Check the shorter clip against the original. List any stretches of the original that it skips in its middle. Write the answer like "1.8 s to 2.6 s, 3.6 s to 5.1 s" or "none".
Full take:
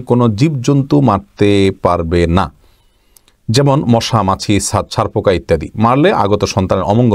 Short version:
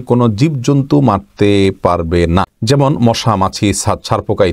2.5 s to 3.4 s